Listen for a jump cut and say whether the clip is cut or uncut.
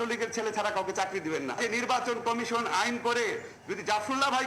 cut